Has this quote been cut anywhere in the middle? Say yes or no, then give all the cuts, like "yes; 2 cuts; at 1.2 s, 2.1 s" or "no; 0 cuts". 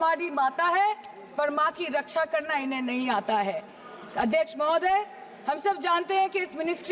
no; 0 cuts